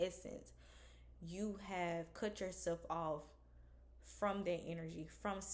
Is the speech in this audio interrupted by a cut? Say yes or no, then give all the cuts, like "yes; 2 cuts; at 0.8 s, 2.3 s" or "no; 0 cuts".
no; 0 cuts